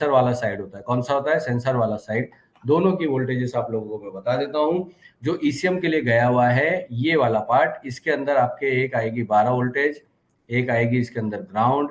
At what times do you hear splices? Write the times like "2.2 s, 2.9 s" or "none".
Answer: none